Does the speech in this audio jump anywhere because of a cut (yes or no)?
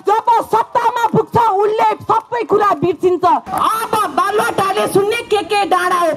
yes